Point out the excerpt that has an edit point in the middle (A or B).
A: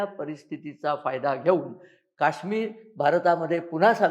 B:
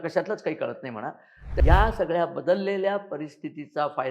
B